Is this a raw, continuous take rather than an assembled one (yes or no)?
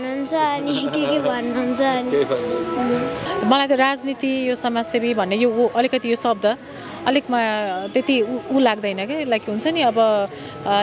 no